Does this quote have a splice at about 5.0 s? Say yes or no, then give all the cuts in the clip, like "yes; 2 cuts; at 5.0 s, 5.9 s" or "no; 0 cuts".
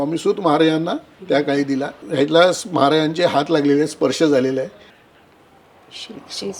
yes; 2 cuts; at 1.1 s, 5.0 s